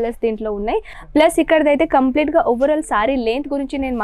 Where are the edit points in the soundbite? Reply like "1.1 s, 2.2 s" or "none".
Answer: 1.0 s